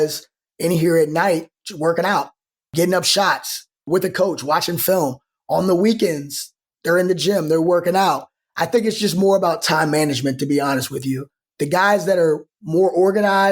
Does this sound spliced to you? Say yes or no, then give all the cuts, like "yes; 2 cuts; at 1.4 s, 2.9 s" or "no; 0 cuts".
yes; 2 cuts; at 2.7 s, 3.9 s